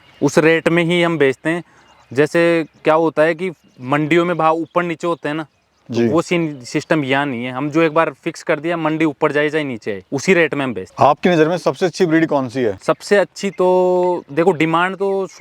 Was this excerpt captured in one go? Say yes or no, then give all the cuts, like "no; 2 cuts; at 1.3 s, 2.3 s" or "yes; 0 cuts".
yes; 0 cuts